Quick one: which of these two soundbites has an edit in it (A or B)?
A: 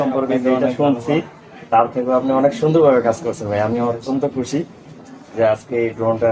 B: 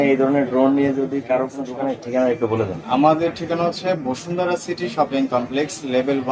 B